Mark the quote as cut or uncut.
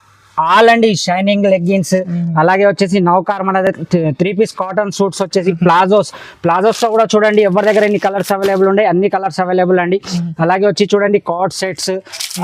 uncut